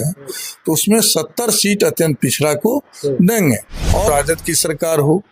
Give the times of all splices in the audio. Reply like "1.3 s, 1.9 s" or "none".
4.1 s